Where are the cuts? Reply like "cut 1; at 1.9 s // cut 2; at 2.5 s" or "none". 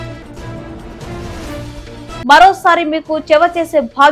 none